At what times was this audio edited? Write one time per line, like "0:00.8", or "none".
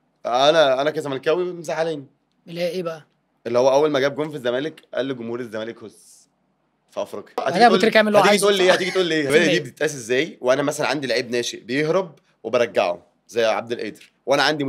0:07.4
0:09.3